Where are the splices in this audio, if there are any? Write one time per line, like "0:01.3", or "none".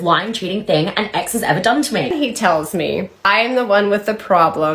0:02.1
0:03.3